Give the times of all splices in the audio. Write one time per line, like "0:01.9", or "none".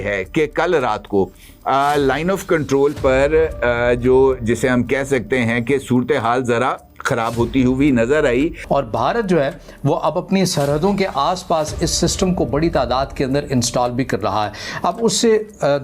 0:08.6